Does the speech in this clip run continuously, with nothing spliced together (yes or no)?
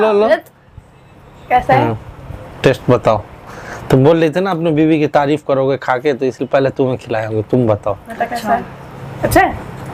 yes